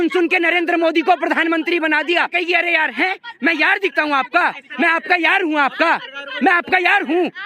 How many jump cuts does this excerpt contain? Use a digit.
1